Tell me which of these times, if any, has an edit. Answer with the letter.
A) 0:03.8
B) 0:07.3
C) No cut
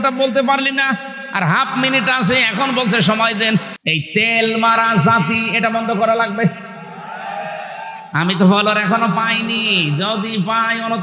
A